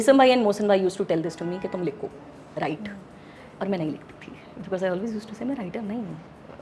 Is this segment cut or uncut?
uncut